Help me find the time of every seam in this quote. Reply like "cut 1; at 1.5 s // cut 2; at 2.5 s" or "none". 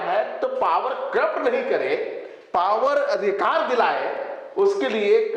none